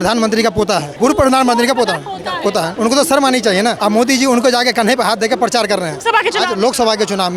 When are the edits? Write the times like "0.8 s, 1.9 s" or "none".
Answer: 0.9 s, 2.7 s, 3.8 s, 6.0 s